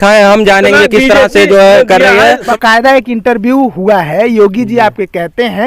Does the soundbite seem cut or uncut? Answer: cut